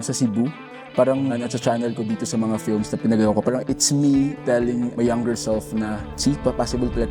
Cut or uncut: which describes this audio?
cut